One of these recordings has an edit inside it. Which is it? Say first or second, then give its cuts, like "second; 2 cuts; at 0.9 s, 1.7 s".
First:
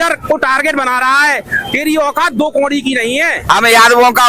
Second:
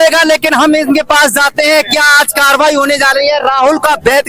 first; 1 cut; at 3.4 s